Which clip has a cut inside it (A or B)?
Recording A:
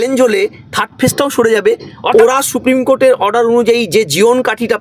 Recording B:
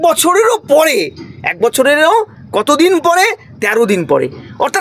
A